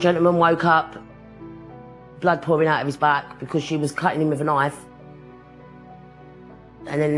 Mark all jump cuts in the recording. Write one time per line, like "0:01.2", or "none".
none